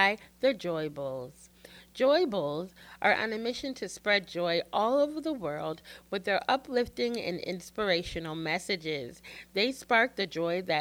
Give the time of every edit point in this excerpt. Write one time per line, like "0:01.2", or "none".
none